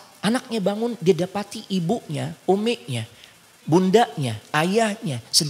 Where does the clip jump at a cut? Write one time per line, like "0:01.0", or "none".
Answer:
none